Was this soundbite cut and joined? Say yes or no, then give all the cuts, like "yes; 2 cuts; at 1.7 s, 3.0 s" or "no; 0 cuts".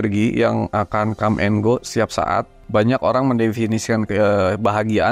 yes; 1 cut; at 2.6 s